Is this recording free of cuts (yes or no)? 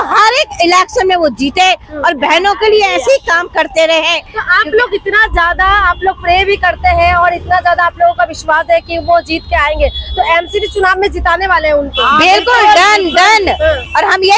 yes